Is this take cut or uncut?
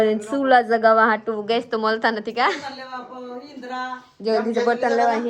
uncut